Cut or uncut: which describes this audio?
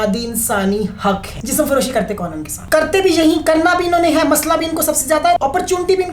cut